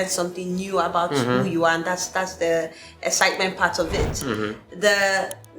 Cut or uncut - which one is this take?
uncut